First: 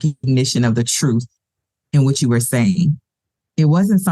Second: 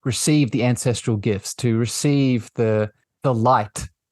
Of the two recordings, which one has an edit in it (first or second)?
second